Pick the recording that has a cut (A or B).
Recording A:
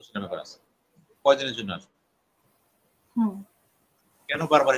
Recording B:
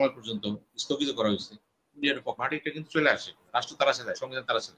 B